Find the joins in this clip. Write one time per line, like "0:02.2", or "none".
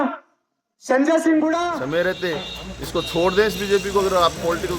0:01.8